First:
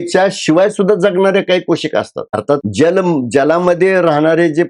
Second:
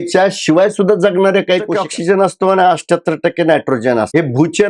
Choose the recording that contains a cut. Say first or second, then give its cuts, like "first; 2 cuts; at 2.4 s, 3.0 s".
second; 1 cut; at 1.8 s